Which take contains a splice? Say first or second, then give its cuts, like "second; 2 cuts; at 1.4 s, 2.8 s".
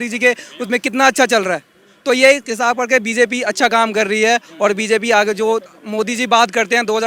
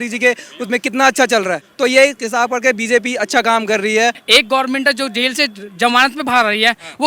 second; 2 cuts; at 1.7 s, 4.2 s